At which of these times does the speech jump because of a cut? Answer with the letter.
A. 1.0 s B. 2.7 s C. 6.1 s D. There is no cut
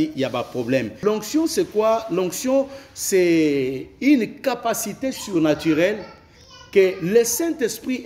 A